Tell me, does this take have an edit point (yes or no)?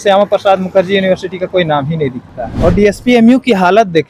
yes